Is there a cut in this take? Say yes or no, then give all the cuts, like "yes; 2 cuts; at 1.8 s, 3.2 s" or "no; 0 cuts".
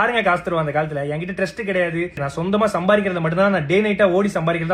yes; 1 cut; at 2.3 s